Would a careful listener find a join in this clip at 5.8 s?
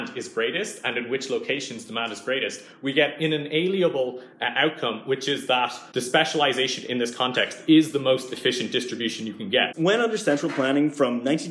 yes; 2 cuts; at 5.8 s, 9.7 s

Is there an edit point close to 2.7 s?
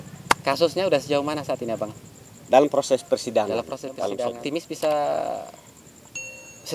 no; 1 cut; at 4.3 s

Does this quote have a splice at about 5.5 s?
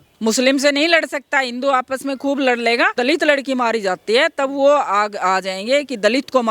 no; 1 cut; at 3.0 s

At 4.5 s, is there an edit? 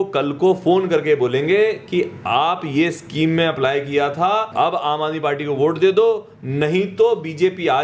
yes; 1 cut; at 4.5 s

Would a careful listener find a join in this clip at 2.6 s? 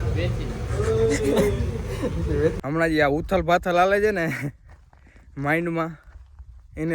yes; 1 cut; at 2.6 s

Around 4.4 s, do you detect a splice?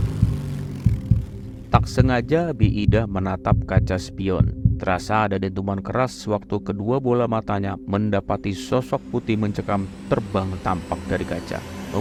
no; 0 cuts

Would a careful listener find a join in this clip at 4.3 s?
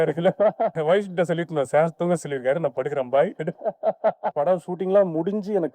yes; 1 cut; at 4.3 s

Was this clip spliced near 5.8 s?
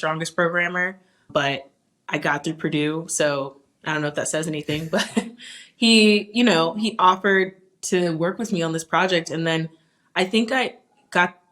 no; 1 cut; at 1.2 s

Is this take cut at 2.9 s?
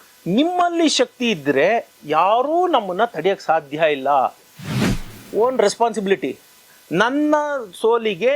no; 1 cut; at 4.7 s

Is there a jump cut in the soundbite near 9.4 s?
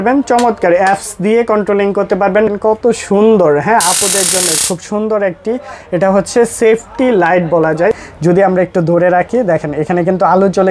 no; 2 cuts; at 2.5 s, 8.0 s

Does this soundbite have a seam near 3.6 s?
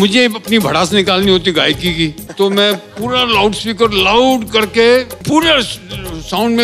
no; 2 cuts; at 2.2 s, 5.2 s

